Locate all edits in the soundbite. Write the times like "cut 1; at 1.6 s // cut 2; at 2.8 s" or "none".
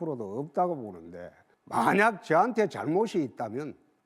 cut 1; at 2.5 s